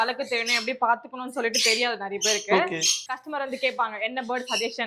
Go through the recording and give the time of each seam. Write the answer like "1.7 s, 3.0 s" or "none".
2.9 s